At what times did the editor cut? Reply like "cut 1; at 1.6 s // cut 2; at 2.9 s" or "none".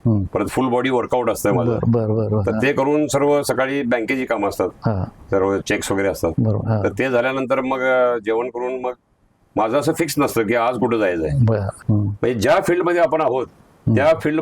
cut 1; at 11.8 s